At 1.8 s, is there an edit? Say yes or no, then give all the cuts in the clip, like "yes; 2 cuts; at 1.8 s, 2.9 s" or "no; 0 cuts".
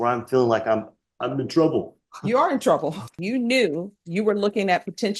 no; 1 cut; at 3.2 s